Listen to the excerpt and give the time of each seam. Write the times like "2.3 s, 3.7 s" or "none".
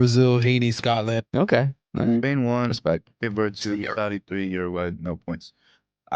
1.2 s